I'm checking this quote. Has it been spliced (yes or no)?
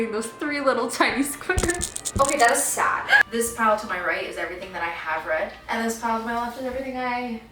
yes